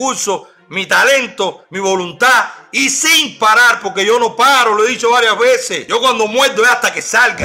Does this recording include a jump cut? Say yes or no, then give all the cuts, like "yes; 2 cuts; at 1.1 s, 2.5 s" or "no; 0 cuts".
yes; 1 cut; at 5.8 s